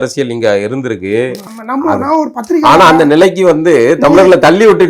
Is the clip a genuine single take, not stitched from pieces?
no; 1 cut; at 1.4 s

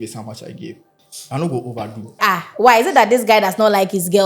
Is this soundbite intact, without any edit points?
no; 2 cuts; at 1.0 s, 2.2 s

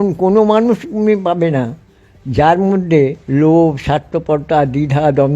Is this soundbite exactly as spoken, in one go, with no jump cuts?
no; 1 cut; at 3.2 s

